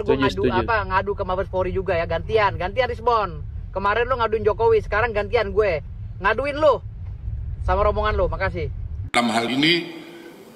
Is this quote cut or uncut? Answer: uncut